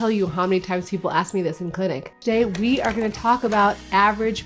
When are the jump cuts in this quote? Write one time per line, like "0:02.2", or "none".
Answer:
0:02.2